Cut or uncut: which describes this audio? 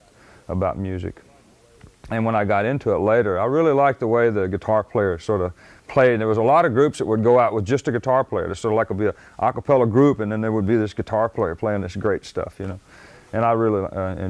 cut